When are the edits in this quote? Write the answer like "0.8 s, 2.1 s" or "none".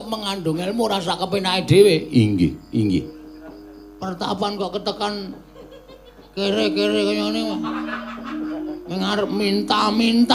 3.2 s